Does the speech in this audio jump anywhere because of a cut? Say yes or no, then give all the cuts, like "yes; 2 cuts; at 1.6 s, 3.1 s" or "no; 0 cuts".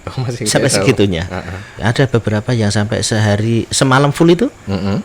yes; 1 cut; at 1.7 s